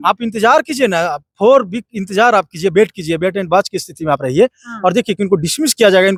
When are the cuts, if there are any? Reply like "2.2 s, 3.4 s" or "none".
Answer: none